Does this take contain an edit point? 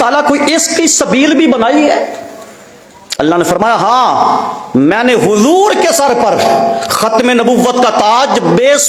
no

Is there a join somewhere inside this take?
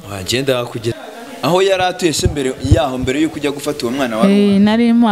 yes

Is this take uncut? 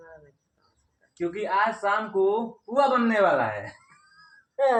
yes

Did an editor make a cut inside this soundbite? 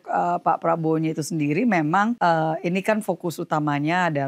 yes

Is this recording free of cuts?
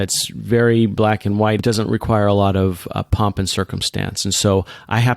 no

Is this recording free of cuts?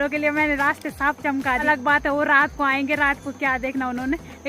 no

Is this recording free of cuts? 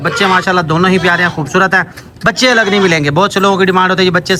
yes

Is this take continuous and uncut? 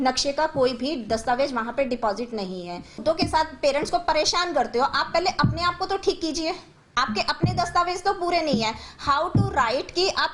no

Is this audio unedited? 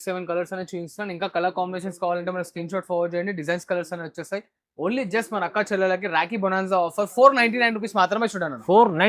yes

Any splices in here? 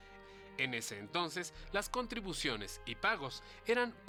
no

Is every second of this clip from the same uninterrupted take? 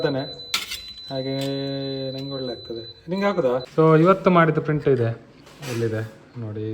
no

